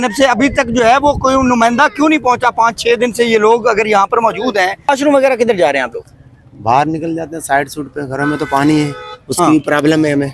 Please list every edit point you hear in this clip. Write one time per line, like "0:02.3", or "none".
0:04.9